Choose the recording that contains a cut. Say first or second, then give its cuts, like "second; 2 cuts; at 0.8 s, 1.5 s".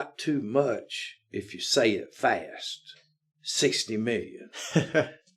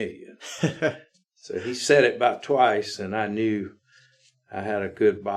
first; 1 cut; at 2.9 s